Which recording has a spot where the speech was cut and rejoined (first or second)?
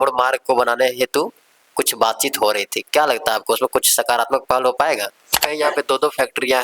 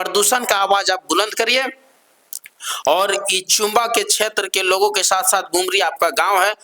first